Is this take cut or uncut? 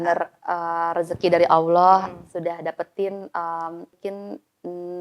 cut